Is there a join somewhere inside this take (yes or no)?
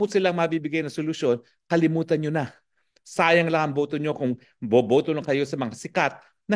no